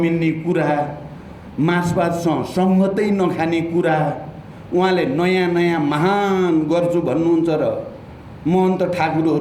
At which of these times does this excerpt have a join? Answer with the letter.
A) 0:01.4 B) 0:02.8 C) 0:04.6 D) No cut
D